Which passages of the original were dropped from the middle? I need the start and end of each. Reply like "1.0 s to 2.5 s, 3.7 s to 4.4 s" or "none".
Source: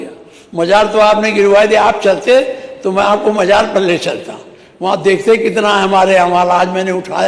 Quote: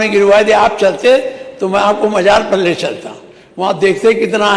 none